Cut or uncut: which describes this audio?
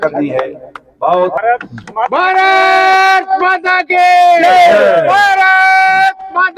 cut